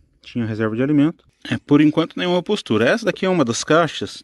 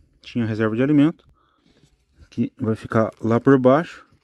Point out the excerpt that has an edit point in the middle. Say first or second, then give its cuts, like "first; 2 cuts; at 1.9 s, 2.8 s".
first; 1 cut; at 1.3 s